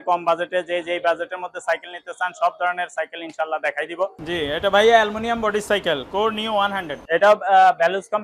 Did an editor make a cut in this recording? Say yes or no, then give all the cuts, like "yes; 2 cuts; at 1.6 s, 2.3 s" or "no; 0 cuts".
yes; 2 cuts; at 4.2 s, 6.9 s